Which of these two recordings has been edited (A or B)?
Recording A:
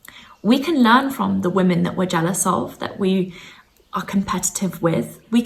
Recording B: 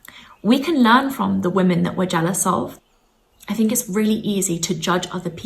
B